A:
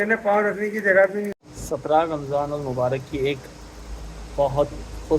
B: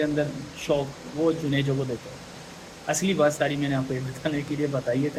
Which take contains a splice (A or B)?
A